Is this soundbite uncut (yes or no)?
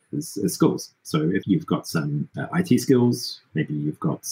no